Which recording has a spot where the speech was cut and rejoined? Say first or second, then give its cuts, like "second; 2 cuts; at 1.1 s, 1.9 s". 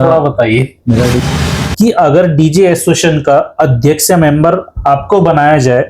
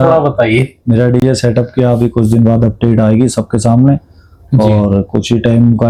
first; 1 cut; at 1.2 s